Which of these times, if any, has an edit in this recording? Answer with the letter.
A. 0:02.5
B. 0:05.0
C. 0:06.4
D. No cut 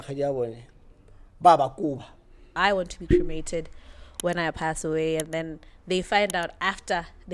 A